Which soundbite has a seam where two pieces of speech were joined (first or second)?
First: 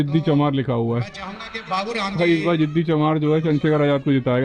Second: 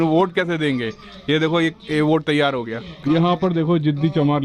second